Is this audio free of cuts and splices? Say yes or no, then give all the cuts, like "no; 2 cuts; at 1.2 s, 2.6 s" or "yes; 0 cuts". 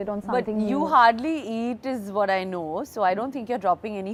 yes; 0 cuts